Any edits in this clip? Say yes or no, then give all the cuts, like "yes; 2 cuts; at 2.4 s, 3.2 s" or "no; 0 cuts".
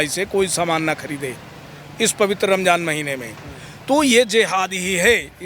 no; 0 cuts